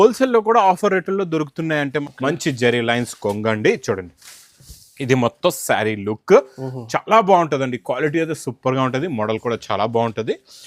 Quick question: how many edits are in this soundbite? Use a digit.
1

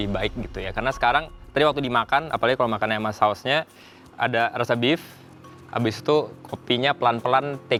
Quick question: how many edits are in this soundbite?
0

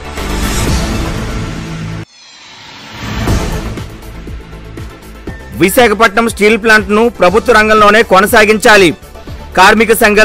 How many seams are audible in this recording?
1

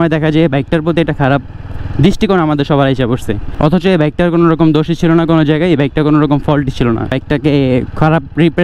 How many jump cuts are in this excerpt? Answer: 2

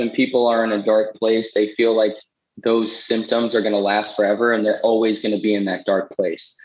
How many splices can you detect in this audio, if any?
0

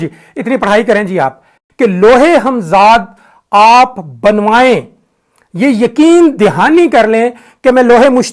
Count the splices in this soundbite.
1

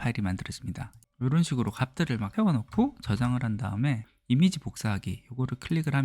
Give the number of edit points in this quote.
3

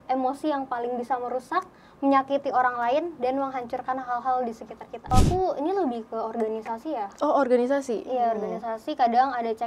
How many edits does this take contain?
1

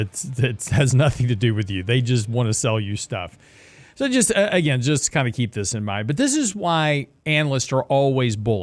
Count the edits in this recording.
0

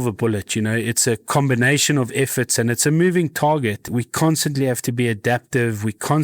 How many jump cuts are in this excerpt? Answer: 1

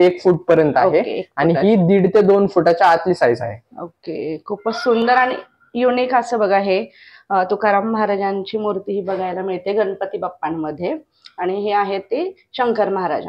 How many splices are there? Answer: 0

